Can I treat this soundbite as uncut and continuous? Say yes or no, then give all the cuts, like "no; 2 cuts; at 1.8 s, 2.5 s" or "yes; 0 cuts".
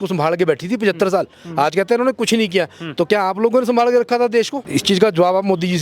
no; 1 cut; at 4.6 s